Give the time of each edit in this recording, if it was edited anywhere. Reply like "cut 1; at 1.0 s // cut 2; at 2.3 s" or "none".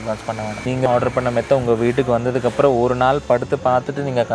none